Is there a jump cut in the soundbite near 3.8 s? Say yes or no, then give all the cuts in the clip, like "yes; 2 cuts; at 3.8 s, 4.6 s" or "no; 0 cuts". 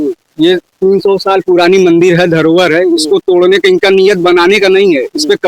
no; 0 cuts